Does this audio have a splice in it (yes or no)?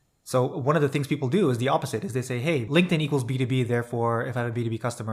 yes